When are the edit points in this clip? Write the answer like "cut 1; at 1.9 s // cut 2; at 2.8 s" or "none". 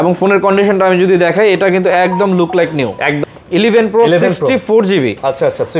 cut 1; at 3.2 s